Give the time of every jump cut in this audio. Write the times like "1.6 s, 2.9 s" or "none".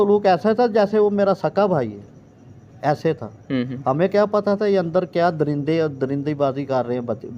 none